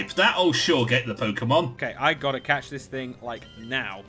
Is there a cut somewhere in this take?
yes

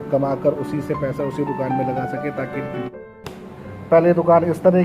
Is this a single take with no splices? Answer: no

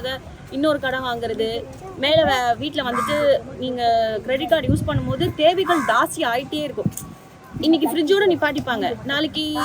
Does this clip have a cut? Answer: no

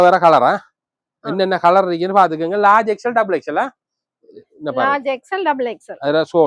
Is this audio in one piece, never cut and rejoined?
yes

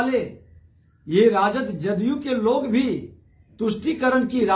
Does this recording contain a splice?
no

